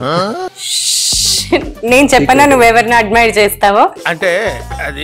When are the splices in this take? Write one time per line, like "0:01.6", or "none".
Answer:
0:04.0